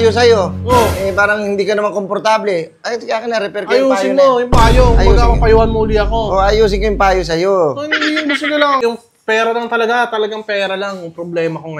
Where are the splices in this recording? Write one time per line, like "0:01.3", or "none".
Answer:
0:08.8